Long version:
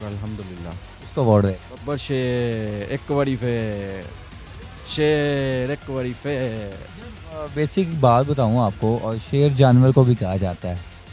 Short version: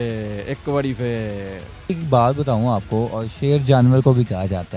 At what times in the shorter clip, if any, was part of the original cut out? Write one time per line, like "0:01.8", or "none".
0:01.9